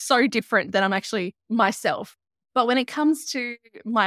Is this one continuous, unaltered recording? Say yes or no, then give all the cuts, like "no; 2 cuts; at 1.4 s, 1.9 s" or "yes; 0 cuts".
no; 2 cuts; at 1.4 s, 2.2 s